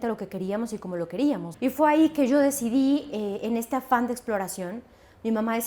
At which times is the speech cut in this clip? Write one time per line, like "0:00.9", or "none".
0:01.5